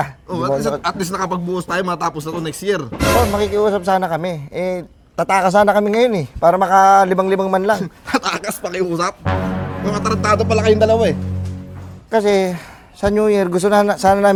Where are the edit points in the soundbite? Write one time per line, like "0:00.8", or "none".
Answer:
none

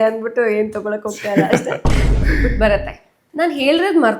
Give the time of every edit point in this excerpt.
0:03.1

